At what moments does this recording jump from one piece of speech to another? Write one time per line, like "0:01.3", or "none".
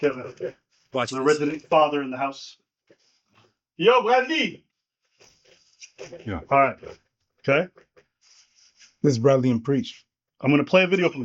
0:09.7